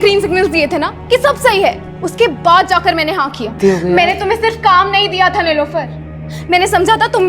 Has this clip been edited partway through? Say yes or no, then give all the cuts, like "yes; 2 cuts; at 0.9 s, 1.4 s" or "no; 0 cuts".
yes; 1 cut; at 3.6 s